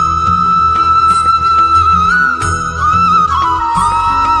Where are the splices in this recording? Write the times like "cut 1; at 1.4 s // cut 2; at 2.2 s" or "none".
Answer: cut 1; at 3.3 s